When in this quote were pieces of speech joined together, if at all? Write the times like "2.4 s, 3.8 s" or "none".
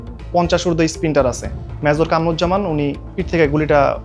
1.5 s, 3.1 s